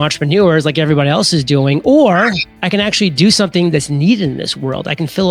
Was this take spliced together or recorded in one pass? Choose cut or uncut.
cut